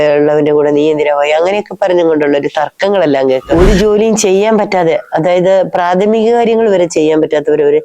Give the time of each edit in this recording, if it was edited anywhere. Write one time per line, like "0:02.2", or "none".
0:03.5